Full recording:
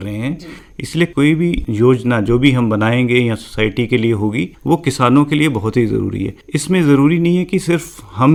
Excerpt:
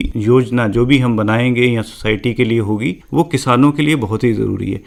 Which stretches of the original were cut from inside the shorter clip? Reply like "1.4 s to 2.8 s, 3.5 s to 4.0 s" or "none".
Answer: none